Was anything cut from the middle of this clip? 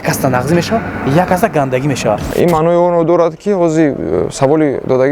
yes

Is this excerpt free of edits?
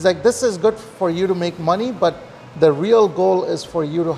yes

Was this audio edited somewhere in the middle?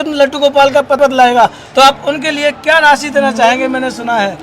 yes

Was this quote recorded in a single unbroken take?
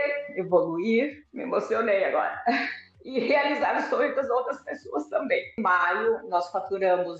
no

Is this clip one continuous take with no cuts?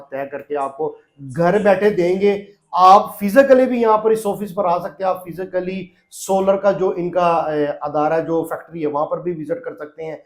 yes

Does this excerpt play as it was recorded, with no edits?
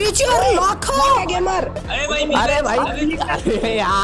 no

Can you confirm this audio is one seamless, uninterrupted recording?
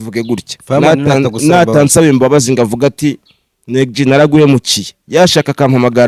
yes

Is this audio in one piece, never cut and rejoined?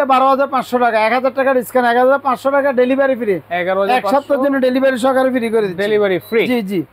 yes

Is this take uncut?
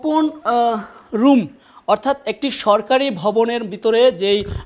yes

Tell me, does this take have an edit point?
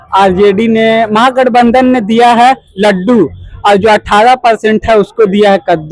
no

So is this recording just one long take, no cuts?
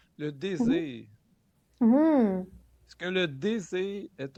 yes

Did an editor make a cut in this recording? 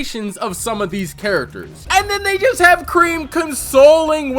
yes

